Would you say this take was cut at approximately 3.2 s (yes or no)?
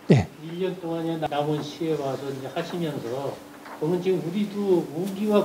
no